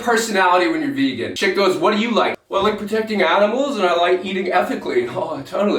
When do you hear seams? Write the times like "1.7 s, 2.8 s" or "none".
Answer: 1.3 s, 2.4 s